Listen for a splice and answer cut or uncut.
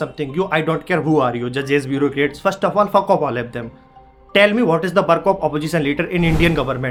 uncut